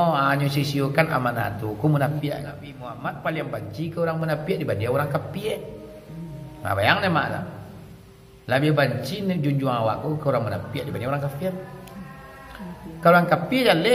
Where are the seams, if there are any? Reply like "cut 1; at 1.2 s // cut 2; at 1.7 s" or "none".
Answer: cut 1; at 2.8 s